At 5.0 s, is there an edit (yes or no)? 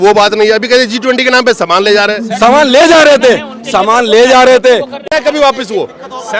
yes